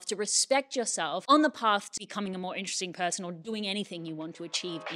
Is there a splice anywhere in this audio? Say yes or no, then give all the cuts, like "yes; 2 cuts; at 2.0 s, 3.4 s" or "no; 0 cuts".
yes; 2 cuts; at 1.2 s, 1.9 s